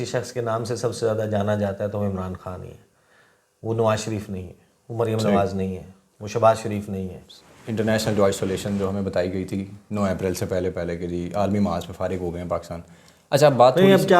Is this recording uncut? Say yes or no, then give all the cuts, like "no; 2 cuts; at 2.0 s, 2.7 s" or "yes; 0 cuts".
no; 1 cut; at 7.5 s